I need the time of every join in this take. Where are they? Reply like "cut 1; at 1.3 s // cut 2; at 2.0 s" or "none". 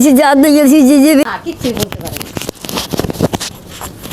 cut 1; at 1.2 s